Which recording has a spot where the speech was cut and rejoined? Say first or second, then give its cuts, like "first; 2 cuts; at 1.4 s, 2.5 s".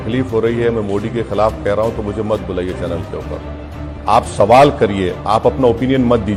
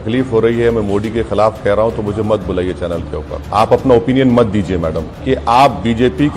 second; 2 cuts; at 3.4 s, 5.1 s